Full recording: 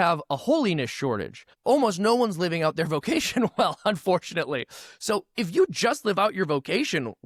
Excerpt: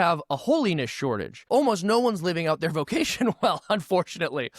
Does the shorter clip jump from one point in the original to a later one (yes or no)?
yes